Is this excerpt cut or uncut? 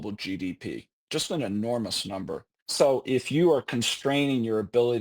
cut